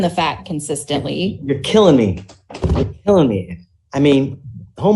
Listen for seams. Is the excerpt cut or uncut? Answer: uncut